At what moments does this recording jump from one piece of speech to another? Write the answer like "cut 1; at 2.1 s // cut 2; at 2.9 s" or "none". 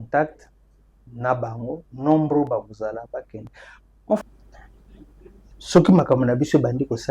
cut 1; at 4.2 s